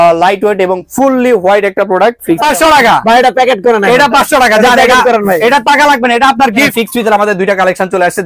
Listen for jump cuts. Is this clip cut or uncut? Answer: cut